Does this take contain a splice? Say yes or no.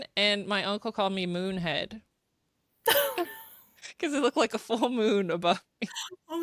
no